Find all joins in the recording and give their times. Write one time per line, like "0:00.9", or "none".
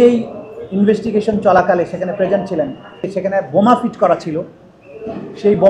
0:03.1